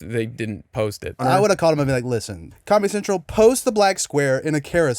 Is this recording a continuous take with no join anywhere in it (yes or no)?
no